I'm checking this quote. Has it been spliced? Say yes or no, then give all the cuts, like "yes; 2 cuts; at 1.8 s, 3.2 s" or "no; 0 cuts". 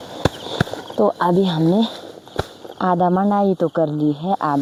no; 0 cuts